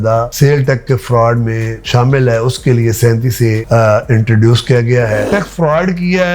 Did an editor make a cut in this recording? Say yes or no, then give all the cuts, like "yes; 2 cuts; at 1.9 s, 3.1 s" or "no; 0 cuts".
yes; 1 cut; at 5.3 s